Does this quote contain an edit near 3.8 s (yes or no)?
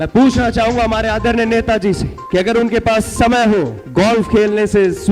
yes